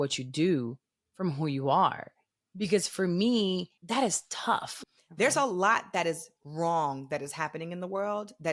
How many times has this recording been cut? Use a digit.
2